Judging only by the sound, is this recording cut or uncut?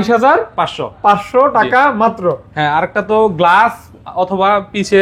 uncut